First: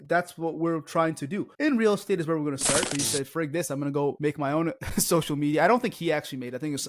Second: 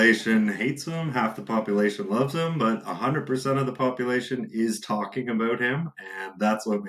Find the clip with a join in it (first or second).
first